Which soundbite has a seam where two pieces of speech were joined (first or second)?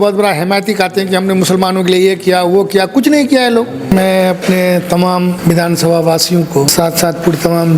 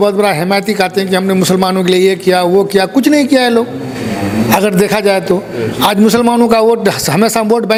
first